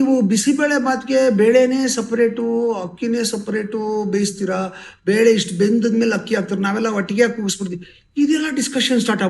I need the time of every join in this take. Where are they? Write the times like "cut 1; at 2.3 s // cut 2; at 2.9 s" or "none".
none